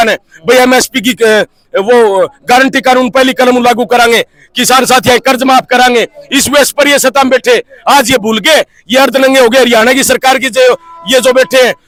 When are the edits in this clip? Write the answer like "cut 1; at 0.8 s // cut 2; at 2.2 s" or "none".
none